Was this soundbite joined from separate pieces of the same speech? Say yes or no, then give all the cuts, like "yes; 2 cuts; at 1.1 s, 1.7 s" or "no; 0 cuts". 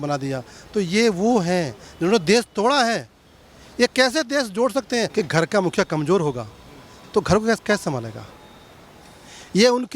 yes; 1 cut; at 5.1 s